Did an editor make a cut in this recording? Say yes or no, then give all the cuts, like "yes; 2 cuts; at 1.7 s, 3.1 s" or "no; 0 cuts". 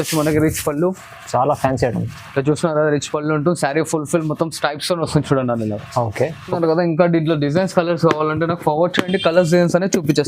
yes; 1 cut; at 6.6 s